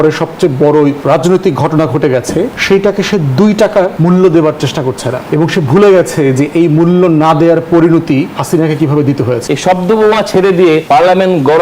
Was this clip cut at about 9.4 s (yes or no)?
yes